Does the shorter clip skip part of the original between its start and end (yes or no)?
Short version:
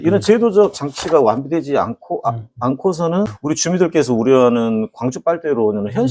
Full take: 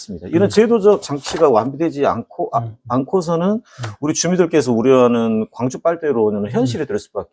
yes